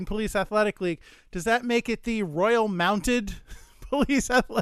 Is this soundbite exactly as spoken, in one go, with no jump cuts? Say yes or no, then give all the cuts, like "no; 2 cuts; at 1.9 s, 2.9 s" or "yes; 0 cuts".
yes; 0 cuts